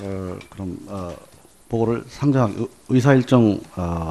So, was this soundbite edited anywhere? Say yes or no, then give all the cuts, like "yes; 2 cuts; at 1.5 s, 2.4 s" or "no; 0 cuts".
no; 0 cuts